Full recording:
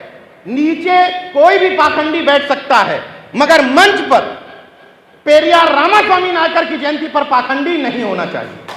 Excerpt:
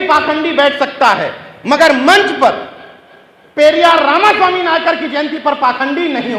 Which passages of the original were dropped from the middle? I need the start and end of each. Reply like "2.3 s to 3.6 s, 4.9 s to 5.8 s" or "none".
none